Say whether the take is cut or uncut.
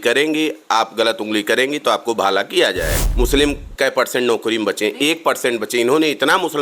cut